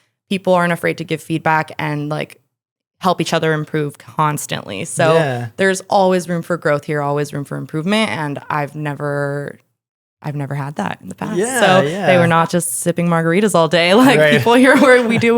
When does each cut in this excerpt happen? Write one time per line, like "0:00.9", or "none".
0:12.0